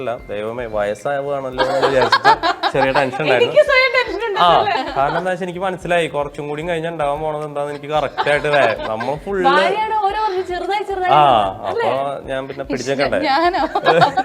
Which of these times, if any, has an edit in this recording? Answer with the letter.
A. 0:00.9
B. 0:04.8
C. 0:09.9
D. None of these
B